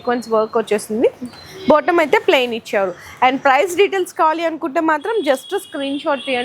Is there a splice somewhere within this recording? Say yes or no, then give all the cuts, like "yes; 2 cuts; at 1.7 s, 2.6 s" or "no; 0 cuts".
no; 0 cuts